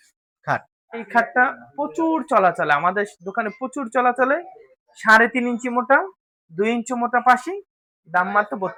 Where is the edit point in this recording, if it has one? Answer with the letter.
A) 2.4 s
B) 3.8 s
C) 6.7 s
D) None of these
D